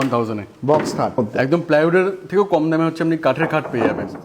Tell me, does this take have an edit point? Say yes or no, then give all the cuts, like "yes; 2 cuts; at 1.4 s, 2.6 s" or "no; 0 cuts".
yes; 1 cut; at 1.1 s